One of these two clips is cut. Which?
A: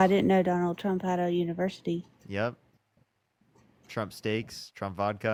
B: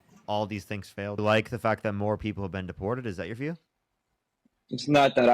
B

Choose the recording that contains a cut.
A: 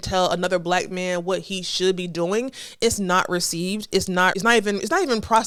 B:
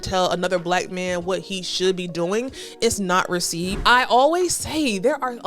B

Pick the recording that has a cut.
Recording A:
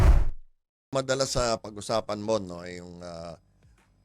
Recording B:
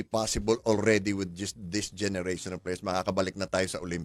A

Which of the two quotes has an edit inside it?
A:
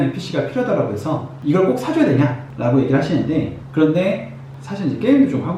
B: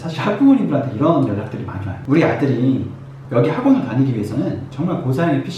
A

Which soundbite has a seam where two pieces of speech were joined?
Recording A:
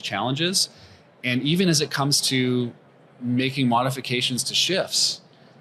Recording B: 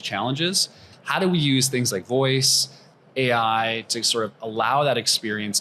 B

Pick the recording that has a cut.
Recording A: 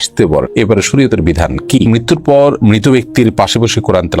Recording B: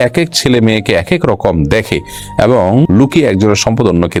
A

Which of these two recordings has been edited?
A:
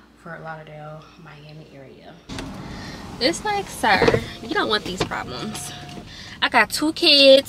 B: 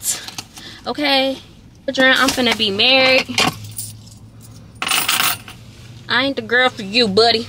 A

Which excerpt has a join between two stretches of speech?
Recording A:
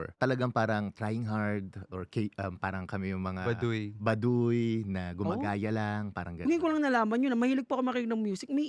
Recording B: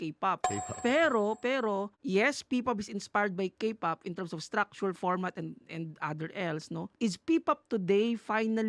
B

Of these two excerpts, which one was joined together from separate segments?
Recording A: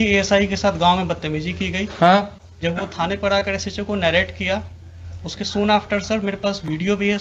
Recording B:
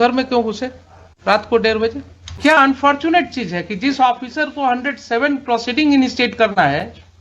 B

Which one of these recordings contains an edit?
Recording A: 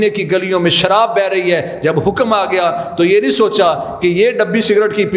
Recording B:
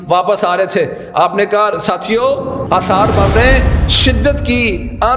B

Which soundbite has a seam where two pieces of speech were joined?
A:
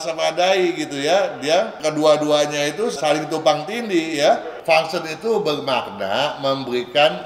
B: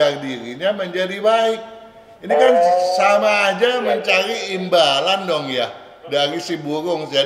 A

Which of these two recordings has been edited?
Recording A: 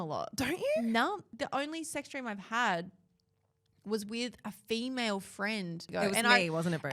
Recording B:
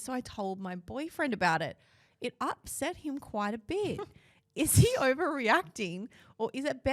A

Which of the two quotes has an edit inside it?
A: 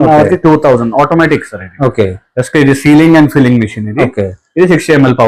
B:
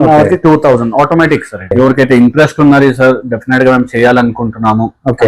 B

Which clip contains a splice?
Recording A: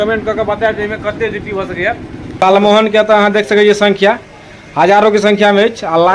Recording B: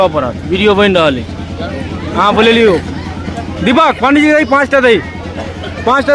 A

